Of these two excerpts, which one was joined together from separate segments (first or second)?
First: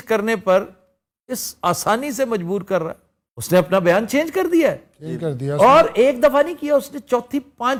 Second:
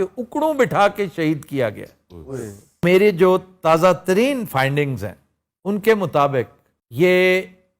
second